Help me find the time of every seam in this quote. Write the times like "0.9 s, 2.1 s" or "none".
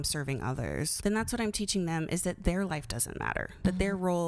0.9 s